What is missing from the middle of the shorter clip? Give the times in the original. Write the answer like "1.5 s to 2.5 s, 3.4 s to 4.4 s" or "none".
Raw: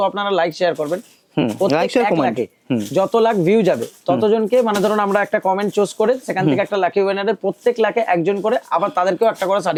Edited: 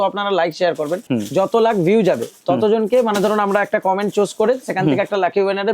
1.0 s to 2.6 s